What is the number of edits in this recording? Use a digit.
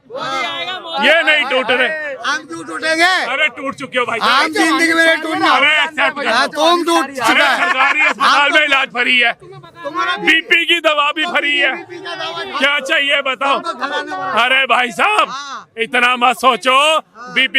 0